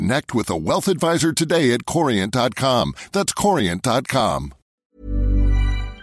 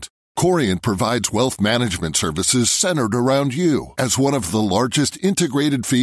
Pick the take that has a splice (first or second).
first